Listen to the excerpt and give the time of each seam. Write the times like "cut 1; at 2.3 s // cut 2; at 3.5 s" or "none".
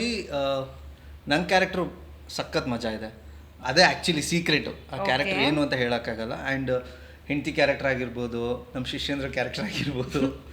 cut 1; at 3.6 s